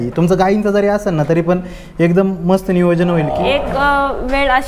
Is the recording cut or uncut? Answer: cut